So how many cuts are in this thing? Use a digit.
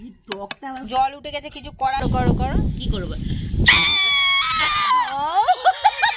1